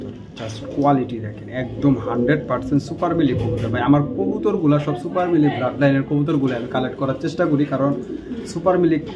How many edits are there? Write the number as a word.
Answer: zero